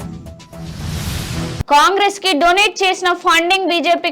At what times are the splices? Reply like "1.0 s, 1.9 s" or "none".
1.6 s